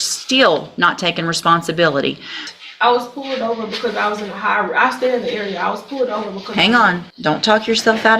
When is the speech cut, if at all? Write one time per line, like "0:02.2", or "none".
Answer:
0:02.5
0:07.1